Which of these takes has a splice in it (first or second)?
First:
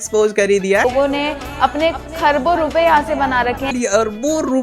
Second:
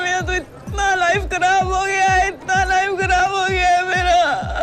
first